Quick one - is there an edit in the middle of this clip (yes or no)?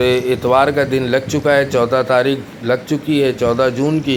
no